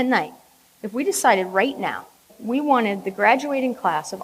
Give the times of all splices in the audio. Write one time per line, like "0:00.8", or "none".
0:02.4